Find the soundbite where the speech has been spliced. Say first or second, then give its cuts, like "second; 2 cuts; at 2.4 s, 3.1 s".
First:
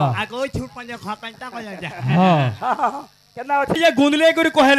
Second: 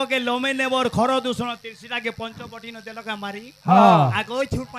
first; 1 cut; at 3.8 s